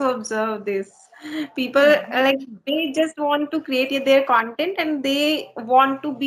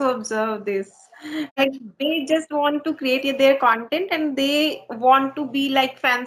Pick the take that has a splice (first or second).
second